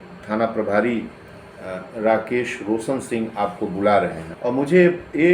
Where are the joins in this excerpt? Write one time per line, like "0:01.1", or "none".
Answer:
0:04.2